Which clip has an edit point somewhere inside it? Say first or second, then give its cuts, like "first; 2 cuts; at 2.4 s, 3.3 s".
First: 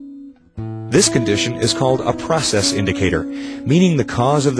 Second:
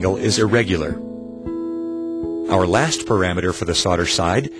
second; 2 cuts; at 0.9 s, 2.2 s